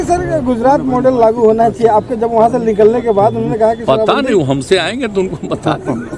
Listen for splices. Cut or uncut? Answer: uncut